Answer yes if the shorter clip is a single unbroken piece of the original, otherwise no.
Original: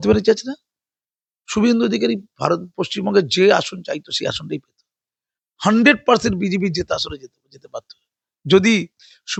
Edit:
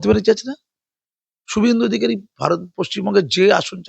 yes